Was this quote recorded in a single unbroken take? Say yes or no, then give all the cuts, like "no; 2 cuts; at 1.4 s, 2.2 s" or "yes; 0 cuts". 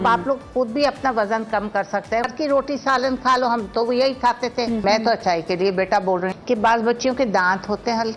no; 3 cuts; at 2.3 s, 4.8 s, 6.3 s